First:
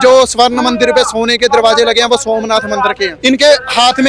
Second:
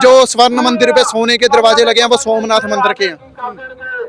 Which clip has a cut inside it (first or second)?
first